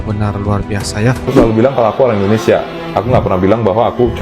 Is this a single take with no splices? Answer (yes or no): no